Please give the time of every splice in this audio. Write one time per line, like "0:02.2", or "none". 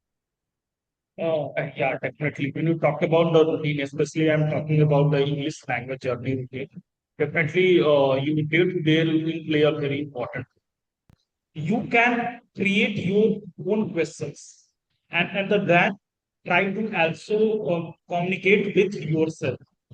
0:11.1